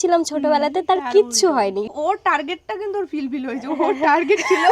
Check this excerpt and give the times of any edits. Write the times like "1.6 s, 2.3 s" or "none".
1.9 s